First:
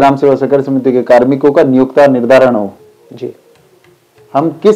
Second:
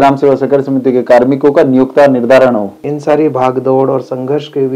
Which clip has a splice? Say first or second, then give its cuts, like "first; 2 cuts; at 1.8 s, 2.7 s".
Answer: second; 1 cut; at 2.9 s